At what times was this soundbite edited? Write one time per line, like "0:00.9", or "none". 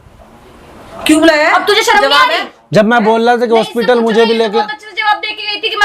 none